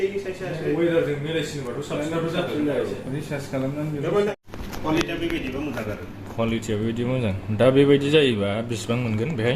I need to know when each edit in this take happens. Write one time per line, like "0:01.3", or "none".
0:04.5